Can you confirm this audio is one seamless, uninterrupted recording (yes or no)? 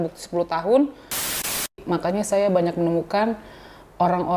no